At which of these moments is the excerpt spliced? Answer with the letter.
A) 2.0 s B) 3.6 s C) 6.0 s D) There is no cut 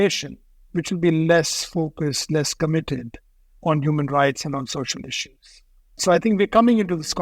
C